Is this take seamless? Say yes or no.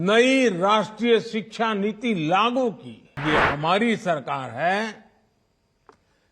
no